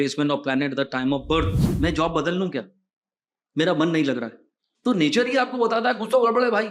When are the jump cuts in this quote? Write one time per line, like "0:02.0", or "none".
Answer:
0:01.7